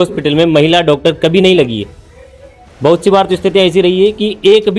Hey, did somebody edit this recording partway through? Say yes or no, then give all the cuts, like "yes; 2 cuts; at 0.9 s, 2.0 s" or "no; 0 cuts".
no; 0 cuts